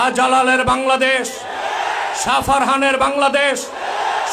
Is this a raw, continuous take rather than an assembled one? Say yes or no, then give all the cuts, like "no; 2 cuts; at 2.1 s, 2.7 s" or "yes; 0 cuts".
yes; 0 cuts